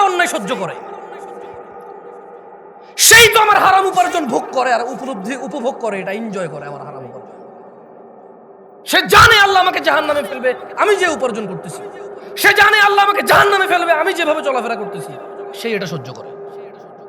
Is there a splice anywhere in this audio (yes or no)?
no